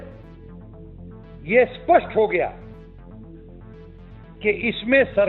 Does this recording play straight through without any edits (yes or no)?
yes